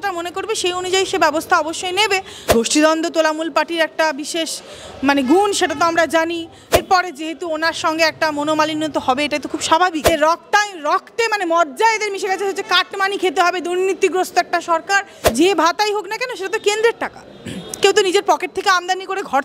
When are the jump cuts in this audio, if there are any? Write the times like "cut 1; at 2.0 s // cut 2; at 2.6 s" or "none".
cut 1; at 2.5 s // cut 2; at 6.7 s // cut 3; at 10.1 s // cut 4; at 15.2 s